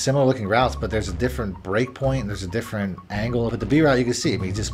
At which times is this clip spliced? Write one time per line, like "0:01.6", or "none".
0:03.5